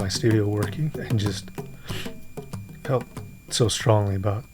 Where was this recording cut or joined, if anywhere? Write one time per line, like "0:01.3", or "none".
0:00.9

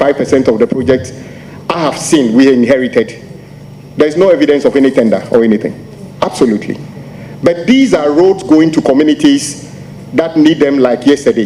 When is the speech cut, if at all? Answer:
none

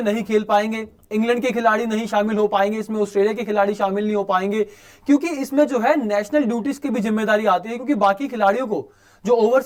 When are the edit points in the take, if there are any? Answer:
none

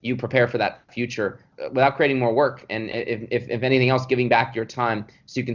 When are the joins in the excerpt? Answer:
0:01.5

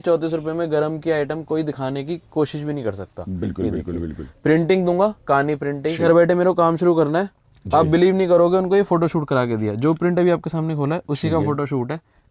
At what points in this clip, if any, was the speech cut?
0:06.0

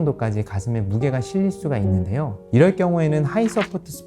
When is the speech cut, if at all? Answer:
0:02.4

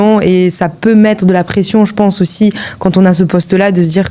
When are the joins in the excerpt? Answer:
none

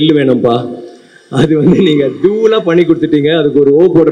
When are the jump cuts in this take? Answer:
none

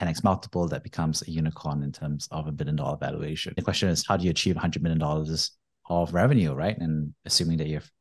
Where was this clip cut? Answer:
0:03.4

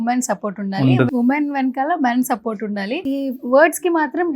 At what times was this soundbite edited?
0:01.1
0:03.0

